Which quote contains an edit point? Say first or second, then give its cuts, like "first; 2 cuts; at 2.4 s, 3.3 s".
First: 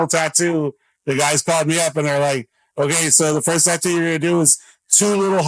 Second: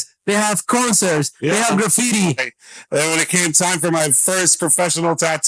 second; 1 cut; at 2.5 s